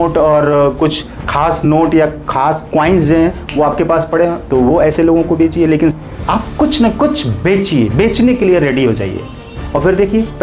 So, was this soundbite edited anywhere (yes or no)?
yes